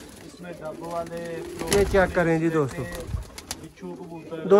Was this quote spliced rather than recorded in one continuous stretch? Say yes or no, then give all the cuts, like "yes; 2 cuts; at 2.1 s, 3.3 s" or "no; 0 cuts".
no; 0 cuts